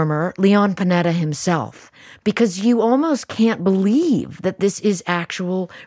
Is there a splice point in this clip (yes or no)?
no